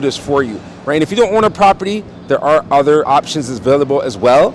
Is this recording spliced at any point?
yes; 1 cut; at 3.1 s

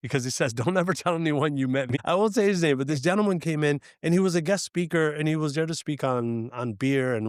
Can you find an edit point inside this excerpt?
yes; 1 cut; at 1.9 s

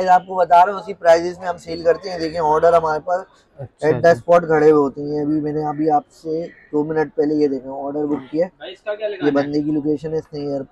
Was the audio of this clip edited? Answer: no; 0 cuts

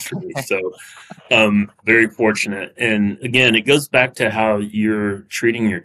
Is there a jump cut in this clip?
yes; 2 cuts; at 1.8 s, 3.2 s

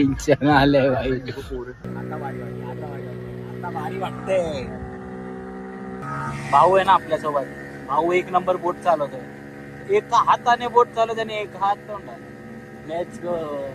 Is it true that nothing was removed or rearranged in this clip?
no; 2 cuts; at 1.9 s, 6.0 s

